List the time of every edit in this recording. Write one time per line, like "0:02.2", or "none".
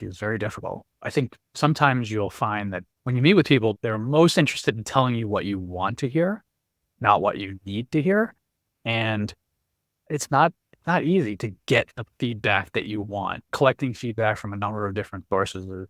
0:01.1
0:02.8
0:03.7
0:10.1
0:13.5

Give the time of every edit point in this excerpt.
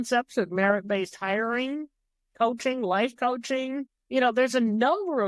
0:04.0

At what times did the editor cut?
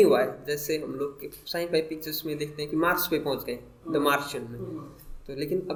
none

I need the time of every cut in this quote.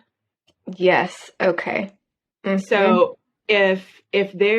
none

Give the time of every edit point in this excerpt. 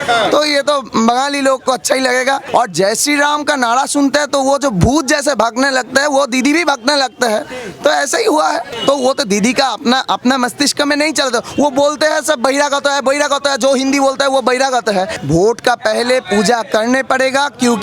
0:02.4
0:08.7
0:15.2

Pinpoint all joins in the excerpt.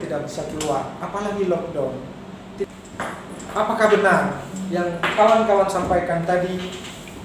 0:02.7

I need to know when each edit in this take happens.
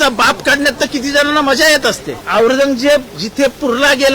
0:02.1

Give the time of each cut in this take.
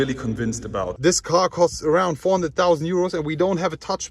0:00.9

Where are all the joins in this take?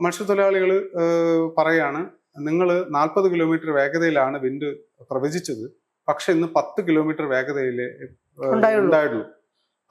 none

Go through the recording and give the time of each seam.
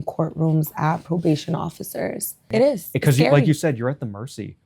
0:02.3

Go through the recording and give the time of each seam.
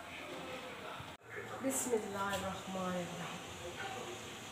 0:01.0

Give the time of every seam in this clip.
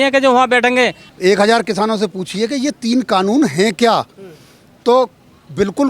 0:01.0

